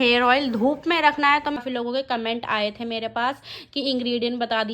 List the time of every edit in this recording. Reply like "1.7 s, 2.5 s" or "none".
1.6 s